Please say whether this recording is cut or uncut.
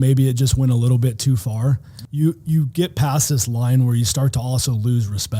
cut